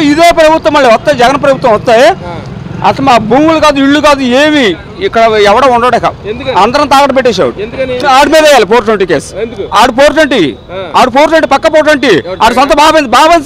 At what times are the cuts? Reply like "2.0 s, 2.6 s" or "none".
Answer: 8.0 s